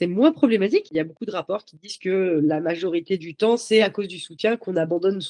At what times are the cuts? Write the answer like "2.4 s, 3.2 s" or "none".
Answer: 0.9 s